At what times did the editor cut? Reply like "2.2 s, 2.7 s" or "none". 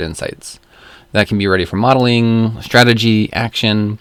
none